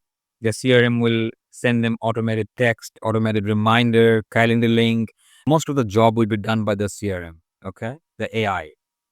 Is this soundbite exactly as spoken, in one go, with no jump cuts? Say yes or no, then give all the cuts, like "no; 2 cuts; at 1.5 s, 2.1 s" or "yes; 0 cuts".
no; 1 cut; at 5.5 s